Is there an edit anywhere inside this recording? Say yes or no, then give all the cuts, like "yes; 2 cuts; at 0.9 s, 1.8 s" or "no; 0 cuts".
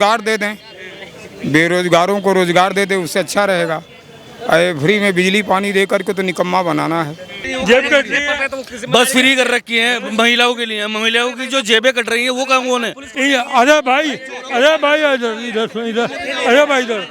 yes; 2 cuts; at 7.4 s, 13.0 s